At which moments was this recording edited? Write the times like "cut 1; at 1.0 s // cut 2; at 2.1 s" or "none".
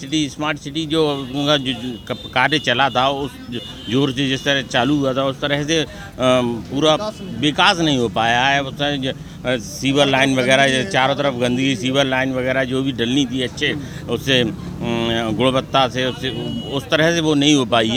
none